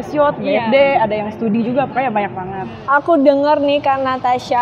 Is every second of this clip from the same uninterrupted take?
no; 1 cut; at 2.7 s

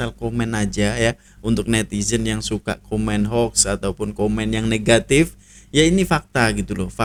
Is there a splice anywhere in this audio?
no; 0 cuts

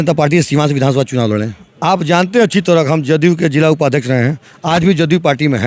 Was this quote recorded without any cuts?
yes; 0 cuts

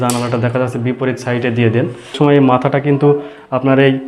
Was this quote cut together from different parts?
yes; 1 cut; at 2.1 s

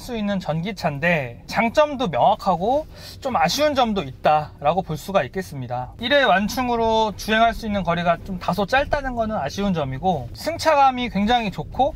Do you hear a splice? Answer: no; 0 cuts

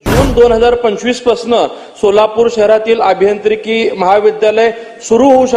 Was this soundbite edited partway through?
no; 0 cuts

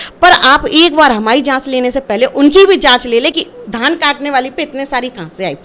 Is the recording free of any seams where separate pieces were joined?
yes; 0 cuts

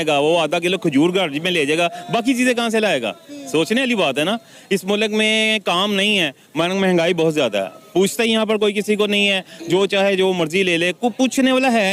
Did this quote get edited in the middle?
no; 0 cuts

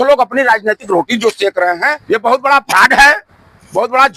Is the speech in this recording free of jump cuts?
no; 1 cut; at 1.9 s

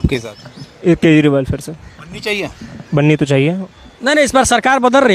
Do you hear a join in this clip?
no; 0 cuts

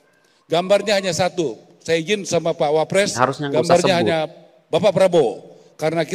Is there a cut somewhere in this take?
no; 0 cuts

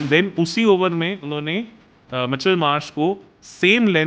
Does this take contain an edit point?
no; 0 cuts

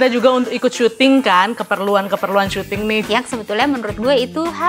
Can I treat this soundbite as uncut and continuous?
no; 1 cut; at 3.0 s

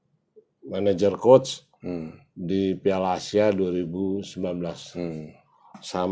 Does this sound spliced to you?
no; 0 cuts

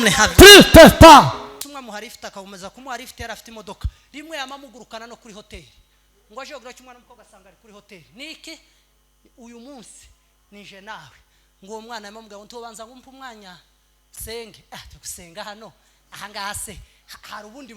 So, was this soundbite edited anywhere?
yes; 1 cut; at 1.6 s

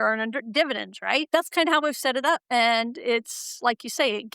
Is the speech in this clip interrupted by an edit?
yes; 2 cuts; at 1.3 s, 2.4 s

